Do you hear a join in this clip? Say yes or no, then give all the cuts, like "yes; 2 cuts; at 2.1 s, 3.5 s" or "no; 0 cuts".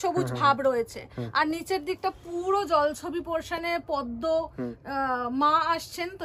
no; 0 cuts